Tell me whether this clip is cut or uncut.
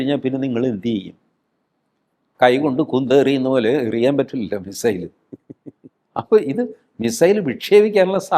uncut